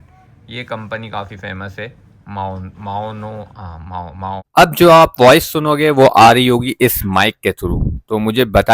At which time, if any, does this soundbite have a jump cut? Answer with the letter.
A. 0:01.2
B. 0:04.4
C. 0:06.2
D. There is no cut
B